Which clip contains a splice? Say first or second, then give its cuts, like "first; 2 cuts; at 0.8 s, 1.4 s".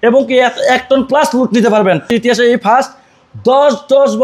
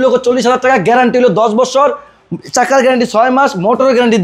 first; 1 cut; at 2.1 s